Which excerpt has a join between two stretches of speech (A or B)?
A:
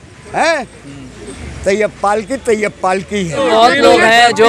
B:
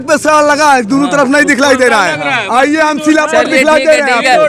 A